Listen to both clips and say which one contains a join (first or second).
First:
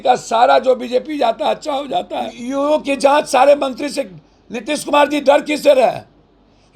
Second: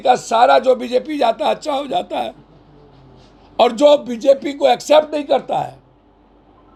first